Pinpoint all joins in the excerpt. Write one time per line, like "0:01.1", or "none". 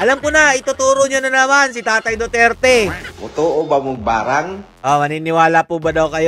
0:03.1
0:04.6